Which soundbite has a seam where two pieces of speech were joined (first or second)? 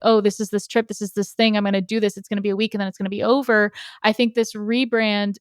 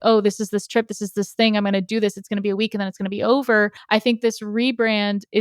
second